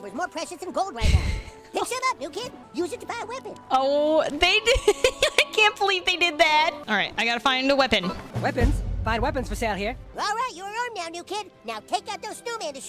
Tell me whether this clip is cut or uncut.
uncut